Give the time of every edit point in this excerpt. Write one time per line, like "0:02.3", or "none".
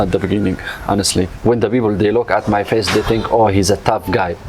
0:01.3